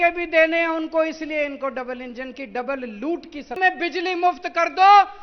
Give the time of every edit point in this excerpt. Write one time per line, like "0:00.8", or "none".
0:03.6